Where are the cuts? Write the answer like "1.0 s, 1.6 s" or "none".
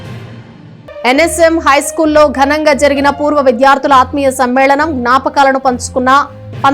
1.0 s